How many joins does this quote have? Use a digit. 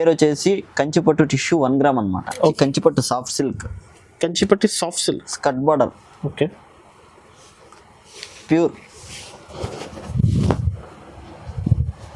1